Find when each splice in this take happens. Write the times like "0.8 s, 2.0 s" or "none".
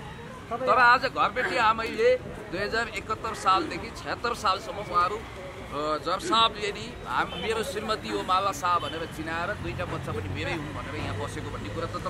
none